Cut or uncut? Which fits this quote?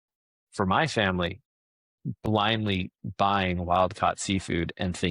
uncut